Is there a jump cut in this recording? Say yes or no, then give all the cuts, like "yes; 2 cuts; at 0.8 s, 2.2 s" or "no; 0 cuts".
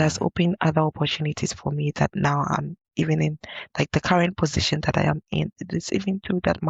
no; 0 cuts